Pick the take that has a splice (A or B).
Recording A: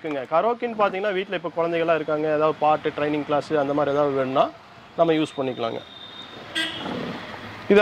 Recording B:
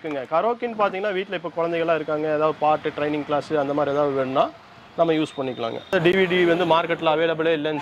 B